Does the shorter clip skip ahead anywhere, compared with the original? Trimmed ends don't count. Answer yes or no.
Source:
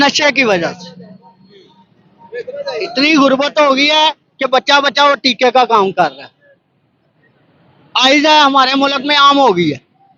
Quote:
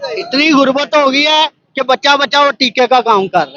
no